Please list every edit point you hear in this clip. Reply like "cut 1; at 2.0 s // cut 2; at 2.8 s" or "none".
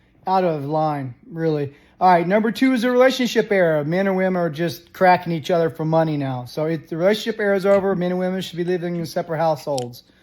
cut 1; at 6.8 s